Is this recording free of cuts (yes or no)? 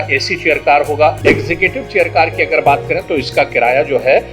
no